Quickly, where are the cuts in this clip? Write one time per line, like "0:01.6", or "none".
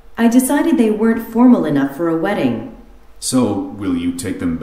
0:02.7